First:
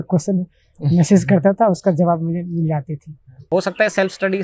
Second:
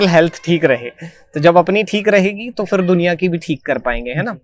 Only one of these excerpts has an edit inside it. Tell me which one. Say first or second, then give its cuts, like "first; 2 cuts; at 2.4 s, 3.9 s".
first; 1 cut; at 3.5 s